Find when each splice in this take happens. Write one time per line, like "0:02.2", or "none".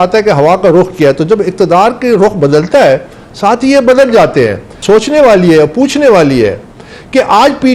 0:04.7